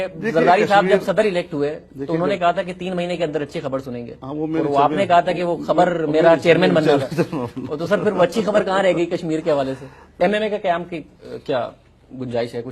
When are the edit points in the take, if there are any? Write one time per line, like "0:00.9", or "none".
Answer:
0:10.1

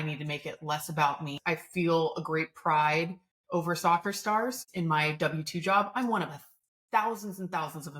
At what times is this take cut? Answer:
0:01.3
0:04.6

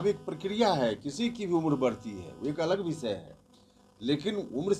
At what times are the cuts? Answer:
none

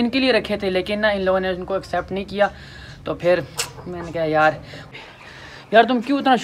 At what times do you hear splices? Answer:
0:05.0

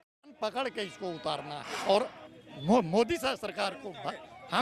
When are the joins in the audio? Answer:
0:01.6

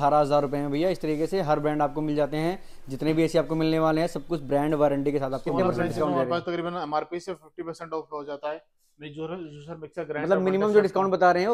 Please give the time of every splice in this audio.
0:05.4

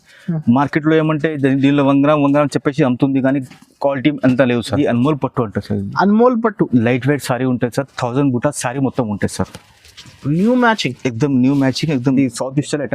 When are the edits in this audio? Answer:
0:04.7
0:12.1

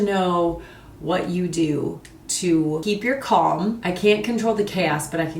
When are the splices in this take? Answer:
0:02.8
0:03.8

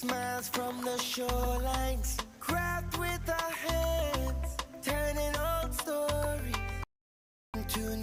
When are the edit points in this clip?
none

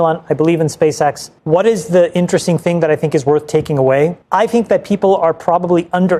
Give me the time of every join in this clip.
0:01.3
0:04.2

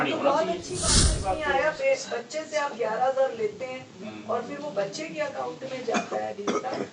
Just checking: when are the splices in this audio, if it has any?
0:01.2

